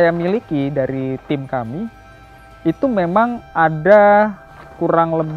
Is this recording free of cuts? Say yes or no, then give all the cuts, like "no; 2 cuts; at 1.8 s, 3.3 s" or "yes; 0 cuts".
yes; 0 cuts